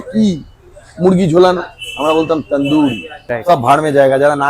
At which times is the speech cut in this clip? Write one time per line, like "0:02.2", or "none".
0:03.2